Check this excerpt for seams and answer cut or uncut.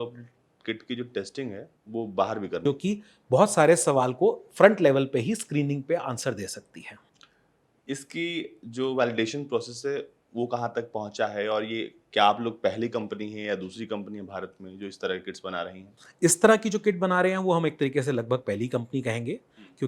cut